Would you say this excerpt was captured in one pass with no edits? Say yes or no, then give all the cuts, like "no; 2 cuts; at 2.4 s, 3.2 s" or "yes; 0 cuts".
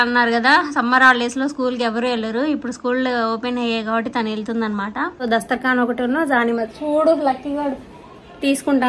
no; 1 cut; at 5.2 s